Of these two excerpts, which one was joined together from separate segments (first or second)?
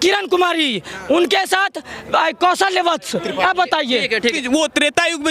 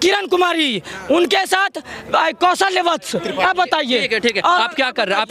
first